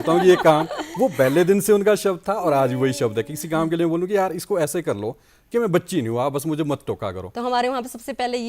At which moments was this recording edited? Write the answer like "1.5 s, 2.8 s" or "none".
7.2 s